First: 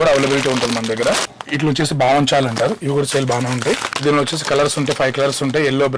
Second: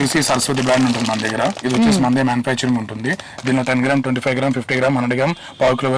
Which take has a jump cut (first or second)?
first